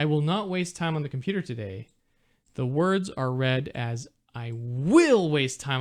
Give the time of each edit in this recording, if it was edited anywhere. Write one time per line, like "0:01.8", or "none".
none